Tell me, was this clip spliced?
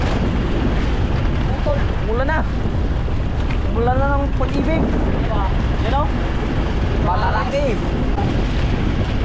yes; 1 cut; at 8.1 s

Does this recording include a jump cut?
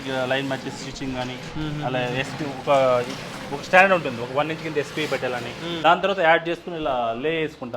yes; 1 cut; at 5.8 s

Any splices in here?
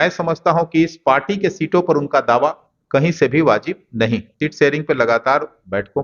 yes; 1 cut; at 4.3 s

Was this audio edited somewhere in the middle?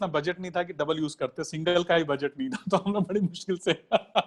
no; 0 cuts

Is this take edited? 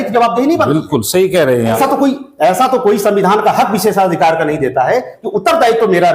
yes; 1 cut; at 1.8 s

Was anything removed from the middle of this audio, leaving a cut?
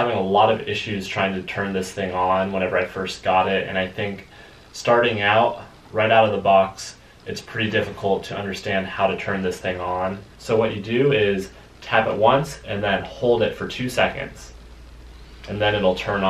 yes; 1 cut; at 10.3 s

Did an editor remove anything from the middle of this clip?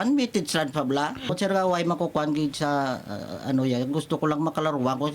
yes; 1 cut; at 1.3 s

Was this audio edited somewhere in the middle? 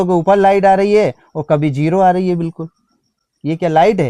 no; 0 cuts

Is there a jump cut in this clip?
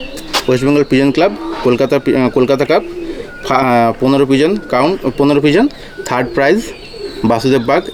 no; 0 cuts

